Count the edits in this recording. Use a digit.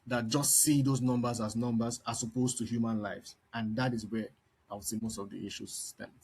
1